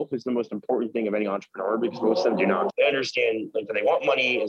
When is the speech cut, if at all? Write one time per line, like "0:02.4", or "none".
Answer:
0:02.7